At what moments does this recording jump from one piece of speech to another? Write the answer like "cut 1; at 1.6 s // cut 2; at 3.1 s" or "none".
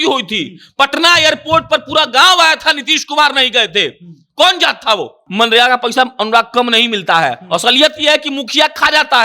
cut 1; at 5.2 s